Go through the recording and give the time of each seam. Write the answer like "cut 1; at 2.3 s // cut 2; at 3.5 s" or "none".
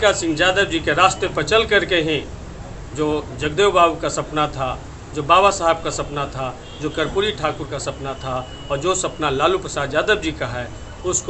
none